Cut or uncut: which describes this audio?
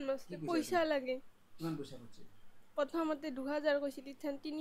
uncut